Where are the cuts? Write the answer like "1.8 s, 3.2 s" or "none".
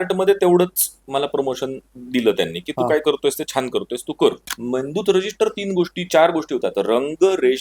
4.5 s